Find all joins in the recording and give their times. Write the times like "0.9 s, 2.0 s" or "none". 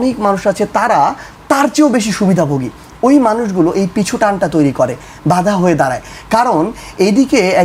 none